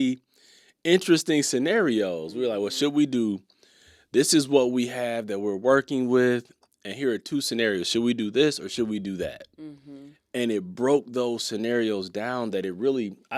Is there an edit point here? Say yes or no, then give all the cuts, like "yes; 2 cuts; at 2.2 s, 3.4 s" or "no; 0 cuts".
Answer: no; 0 cuts